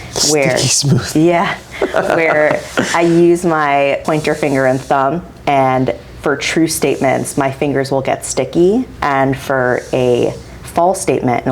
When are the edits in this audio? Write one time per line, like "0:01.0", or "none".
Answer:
0:04.0
0:08.9